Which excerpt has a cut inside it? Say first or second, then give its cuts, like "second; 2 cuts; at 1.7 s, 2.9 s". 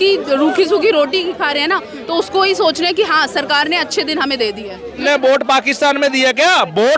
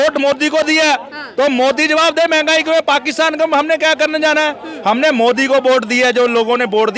first; 1 cut; at 5.0 s